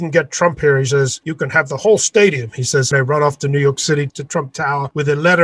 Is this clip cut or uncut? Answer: cut